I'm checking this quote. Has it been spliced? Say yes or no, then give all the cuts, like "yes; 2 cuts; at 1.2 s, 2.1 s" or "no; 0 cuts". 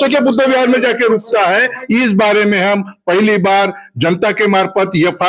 yes; 1 cut; at 1.8 s